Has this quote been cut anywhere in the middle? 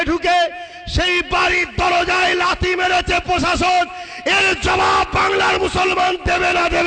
no; 0 cuts

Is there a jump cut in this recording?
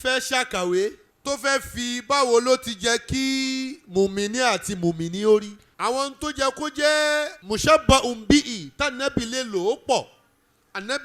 yes; 3 cuts; at 1.1 s, 5.6 s, 7.4 s

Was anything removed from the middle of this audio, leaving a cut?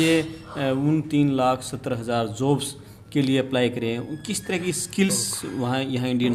no; 0 cuts

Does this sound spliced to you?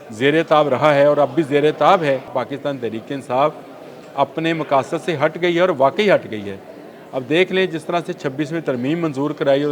yes; 1 cut; at 2.3 s

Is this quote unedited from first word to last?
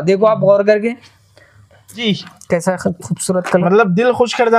no; 1 cut; at 1.9 s

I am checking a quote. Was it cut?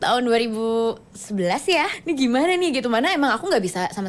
yes; 1 cut; at 1.9 s

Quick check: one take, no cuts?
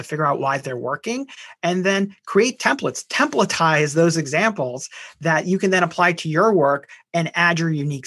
yes; 0 cuts

